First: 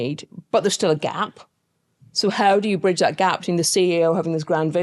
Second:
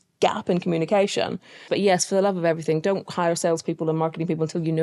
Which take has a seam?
second; 1 cut; at 1.7 s

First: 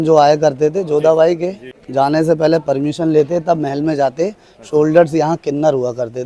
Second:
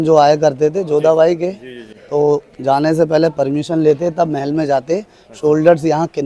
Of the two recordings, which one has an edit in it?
first; 1 cut; at 1.8 s

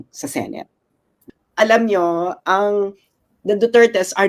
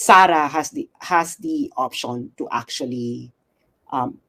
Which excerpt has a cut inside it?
first; 1 cut; at 1.2 s

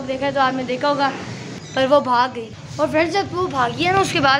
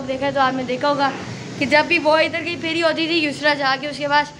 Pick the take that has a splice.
first; 2 cuts; at 1.4 s, 2.5 s

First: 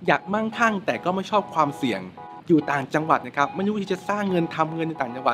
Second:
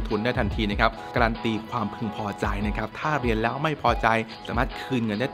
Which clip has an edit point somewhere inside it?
second; 2 cuts; at 1.1 s, 4.4 s

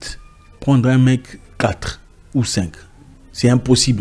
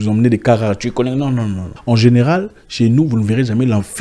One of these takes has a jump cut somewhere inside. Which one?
second; 1 cut; at 1.7 s

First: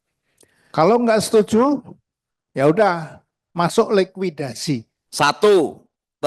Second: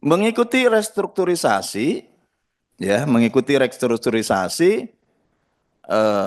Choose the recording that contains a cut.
first; 1 cut; at 5.0 s

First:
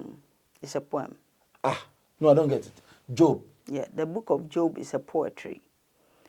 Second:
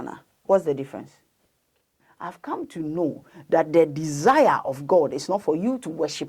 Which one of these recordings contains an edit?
second; 1 cut; at 2.1 s

